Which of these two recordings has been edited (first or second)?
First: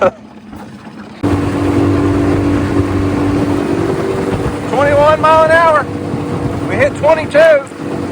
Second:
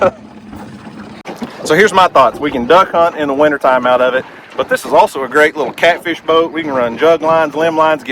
first